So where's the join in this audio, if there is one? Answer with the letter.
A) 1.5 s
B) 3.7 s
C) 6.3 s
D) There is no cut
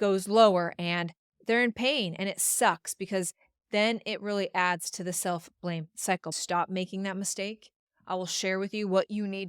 C